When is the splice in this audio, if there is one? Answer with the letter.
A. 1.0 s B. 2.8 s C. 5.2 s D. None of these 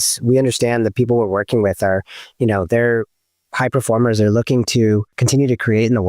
C